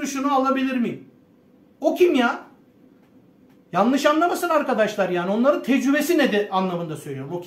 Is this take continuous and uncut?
yes; 0 cuts

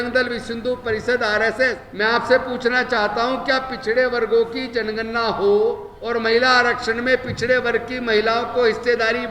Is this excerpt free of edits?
no; 2 cuts; at 1.8 s, 5.9 s

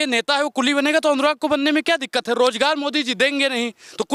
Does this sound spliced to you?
no; 0 cuts

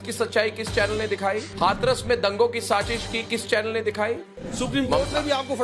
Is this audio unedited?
no; 2 cuts; at 1.5 s, 4.5 s

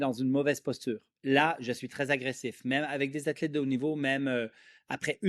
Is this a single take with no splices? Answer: no; 1 cut; at 1.1 s

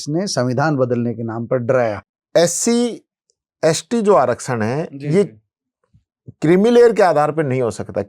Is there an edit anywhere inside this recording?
yes; 1 cut; at 2.1 s

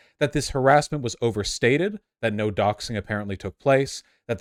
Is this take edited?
no; 0 cuts

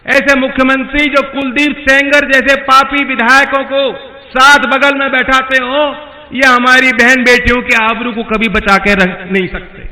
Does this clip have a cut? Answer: no; 0 cuts

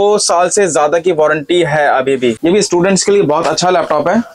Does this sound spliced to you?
yes; 1 cut; at 2.4 s

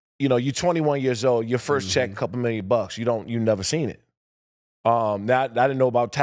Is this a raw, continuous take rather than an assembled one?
yes; 0 cuts

